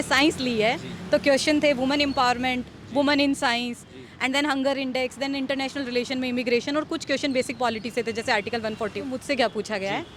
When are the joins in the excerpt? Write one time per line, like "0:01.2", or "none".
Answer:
0:09.2